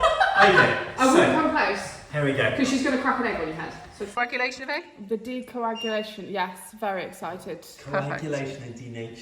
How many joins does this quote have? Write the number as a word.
one